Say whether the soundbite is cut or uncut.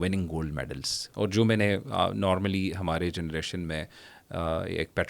cut